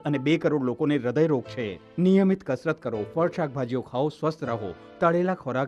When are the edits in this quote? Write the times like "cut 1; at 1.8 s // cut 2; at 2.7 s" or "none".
none